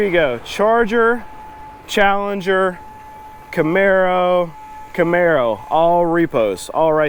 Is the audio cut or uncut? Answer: uncut